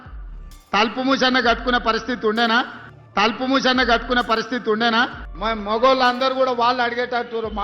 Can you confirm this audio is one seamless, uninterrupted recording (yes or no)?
no